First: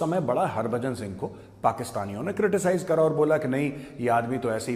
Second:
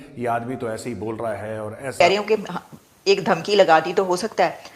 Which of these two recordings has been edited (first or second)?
second